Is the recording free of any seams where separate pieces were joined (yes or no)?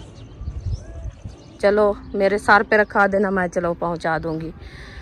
no